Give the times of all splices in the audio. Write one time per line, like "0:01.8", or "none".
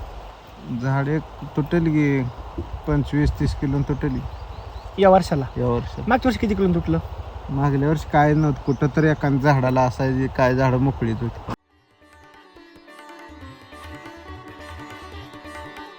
0:11.5